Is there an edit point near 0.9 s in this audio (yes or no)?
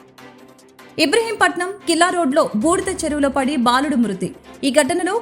yes